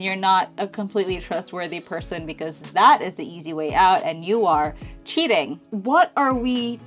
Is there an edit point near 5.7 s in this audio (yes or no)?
yes